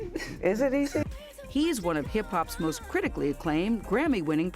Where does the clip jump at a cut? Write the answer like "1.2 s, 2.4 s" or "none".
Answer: 1.1 s